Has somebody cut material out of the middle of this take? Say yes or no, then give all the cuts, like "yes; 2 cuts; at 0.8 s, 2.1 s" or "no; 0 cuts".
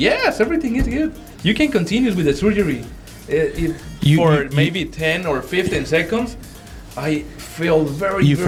no; 0 cuts